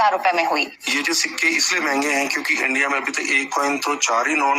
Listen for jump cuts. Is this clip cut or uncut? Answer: uncut